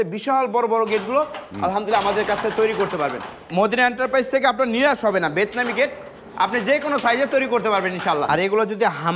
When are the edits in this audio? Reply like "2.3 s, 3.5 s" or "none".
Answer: 3.5 s, 8.3 s

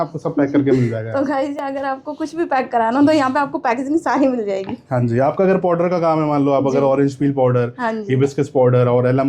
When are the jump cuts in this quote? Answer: none

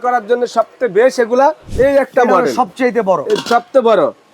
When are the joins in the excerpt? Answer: 1.6 s

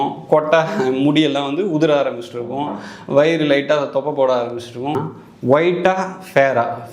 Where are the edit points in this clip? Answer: 5.0 s

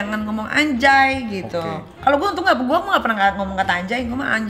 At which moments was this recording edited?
2.0 s

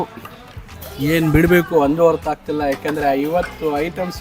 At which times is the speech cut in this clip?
none

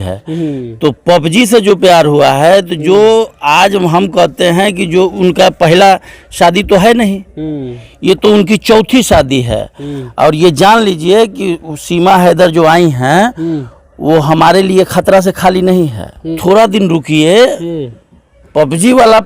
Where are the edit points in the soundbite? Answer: 16.3 s

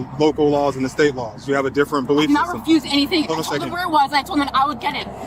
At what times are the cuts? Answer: none

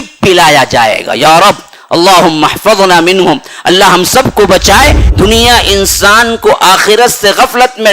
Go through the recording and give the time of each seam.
5.0 s

